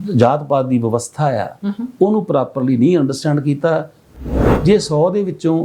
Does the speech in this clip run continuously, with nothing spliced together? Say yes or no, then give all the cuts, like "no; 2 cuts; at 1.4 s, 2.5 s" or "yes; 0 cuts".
no; 1 cut; at 4.2 s